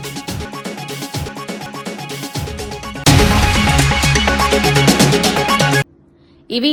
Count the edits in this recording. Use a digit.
0